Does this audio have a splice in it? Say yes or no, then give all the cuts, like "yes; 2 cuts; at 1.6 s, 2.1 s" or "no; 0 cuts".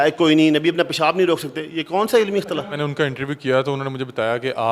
yes; 1 cut; at 2.7 s